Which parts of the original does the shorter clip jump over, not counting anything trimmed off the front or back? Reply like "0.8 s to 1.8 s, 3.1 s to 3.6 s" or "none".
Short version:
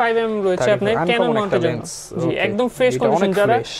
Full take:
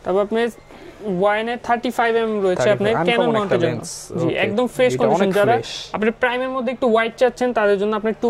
none